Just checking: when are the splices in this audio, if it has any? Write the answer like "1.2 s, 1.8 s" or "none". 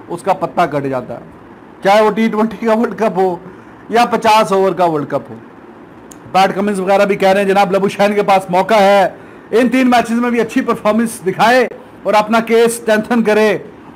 none